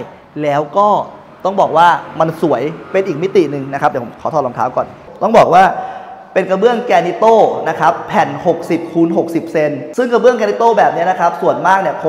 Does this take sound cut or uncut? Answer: uncut